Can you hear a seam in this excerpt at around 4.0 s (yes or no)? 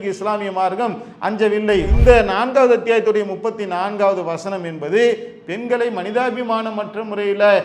no